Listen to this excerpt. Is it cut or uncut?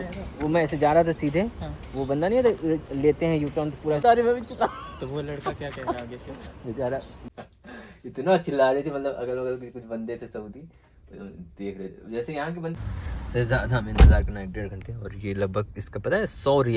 cut